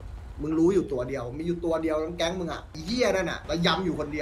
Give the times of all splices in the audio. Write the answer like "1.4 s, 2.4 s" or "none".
2.8 s, 3.4 s